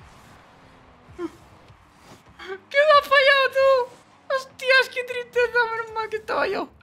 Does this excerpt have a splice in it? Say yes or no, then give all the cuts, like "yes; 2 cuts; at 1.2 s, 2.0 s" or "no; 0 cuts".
no; 0 cuts